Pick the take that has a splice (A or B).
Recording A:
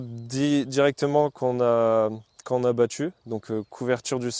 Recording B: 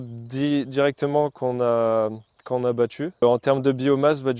B